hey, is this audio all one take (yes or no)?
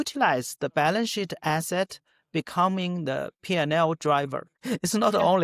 no